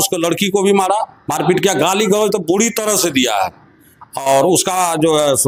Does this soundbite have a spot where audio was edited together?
no; 0 cuts

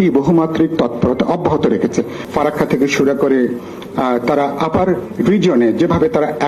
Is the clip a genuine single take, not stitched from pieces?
no; 1 cut; at 2.2 s

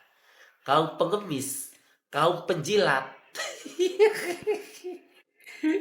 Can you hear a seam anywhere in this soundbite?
no; 0 cuts

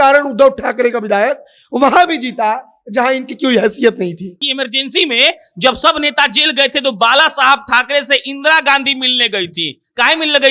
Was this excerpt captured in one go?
no; 1 cut; at 4.4 s

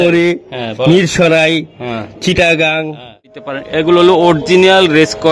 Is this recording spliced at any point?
yes; 1 cut; at 3.4 s

